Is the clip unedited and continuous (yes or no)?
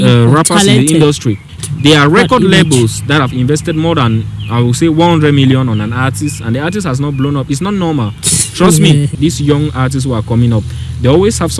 no